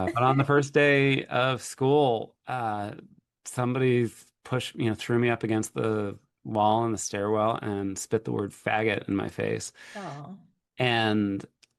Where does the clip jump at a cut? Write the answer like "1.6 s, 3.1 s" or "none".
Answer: none